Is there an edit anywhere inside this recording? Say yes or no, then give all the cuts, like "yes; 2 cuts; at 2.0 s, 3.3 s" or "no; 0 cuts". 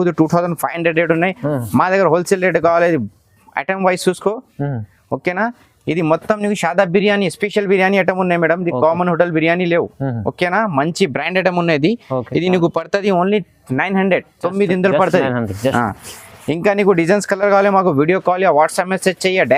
no; 0 cuts